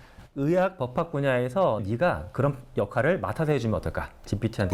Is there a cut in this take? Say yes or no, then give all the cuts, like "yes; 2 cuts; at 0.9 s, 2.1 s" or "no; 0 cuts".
yes; 1 cut; at 1.8 s